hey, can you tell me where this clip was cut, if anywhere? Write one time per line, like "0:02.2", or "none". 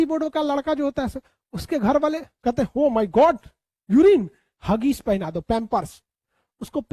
0:02.3